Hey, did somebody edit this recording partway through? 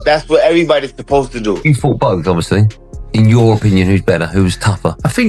yes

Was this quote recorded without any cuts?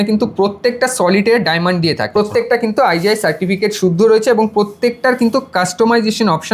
no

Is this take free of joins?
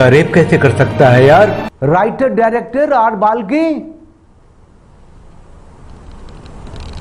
no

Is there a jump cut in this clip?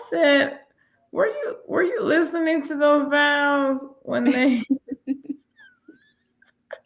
no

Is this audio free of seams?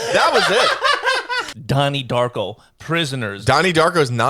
no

